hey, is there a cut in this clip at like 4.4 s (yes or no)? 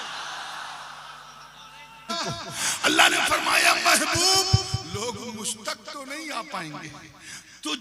no